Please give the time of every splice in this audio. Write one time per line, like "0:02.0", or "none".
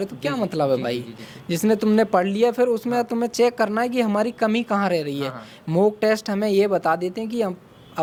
none